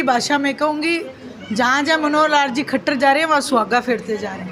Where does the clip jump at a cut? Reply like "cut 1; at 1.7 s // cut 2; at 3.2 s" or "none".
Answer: none